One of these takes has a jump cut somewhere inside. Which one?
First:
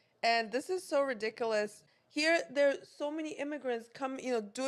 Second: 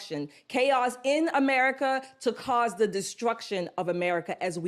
first; 1 cut; at 1.9 s

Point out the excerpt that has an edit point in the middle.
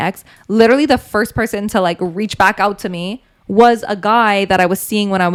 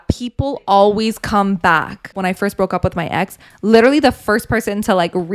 second; 1 cut; at 2.2 s

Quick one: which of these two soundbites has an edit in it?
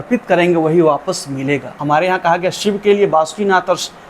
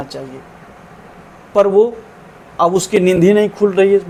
first; 1 cut; at 1.7 s

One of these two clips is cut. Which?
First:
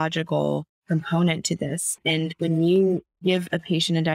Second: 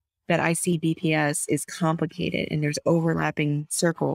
first; 1 cut; at 3.1 s

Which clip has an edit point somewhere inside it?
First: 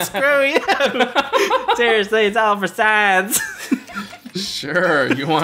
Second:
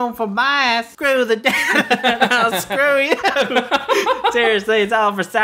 second; 1 cut; at 0.9 s

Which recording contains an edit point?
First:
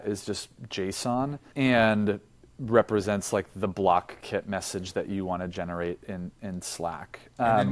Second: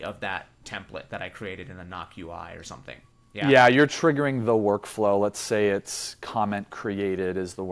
first; 1 cut; at 1.4 s

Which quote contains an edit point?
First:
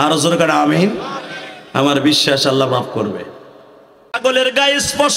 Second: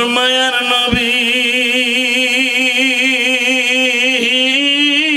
first; 1 cut; at 4.2 s

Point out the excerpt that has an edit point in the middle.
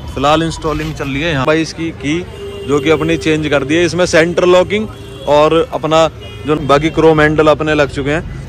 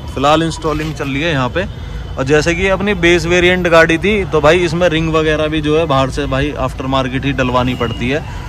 first; 2 cuts; at 1.4 s, 6.6 s

